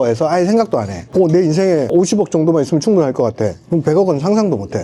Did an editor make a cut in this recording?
no; 0 cuts

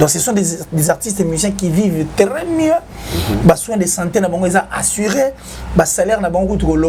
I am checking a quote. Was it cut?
no; 0 cuts

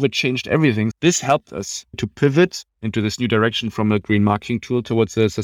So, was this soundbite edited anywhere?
yes; 2 cuts; at 0.9 s, 2.0 s

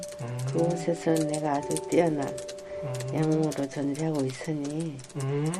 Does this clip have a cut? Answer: no; 0 cuts

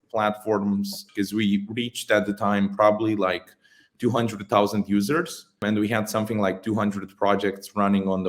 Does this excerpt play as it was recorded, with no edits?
no; 2 cuts; at 1.0 s, 5.6 s

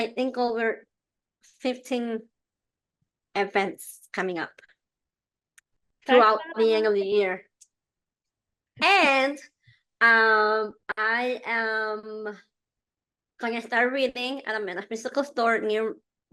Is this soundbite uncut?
yes; 0 cuts

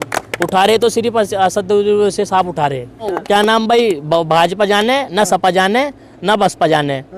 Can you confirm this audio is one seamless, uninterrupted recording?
no; 1 cut; at 3.2 s

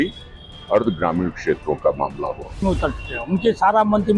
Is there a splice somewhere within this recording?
yes; 1 cut; at 2.6 s

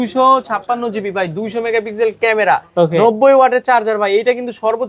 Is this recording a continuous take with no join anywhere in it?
yes; 0 cuts

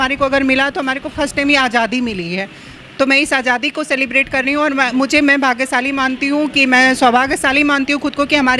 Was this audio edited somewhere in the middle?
no; 0 cuts

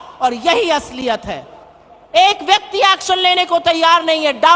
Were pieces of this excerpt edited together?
no; 0 cuts

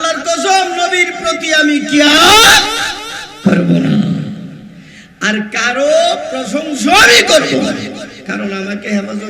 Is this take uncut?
yes; 0 cuts

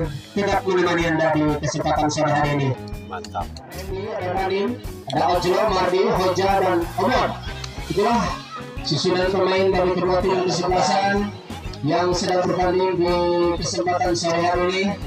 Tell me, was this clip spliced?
yes; 1 cut; at 3.9 s

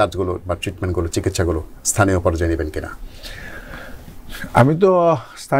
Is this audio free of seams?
yes; 0 cuts

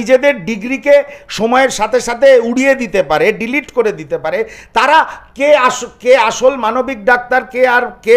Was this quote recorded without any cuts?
yes; 0 cuts

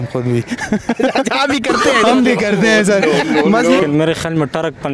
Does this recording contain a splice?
yes; 1 cut; at 3.8 s

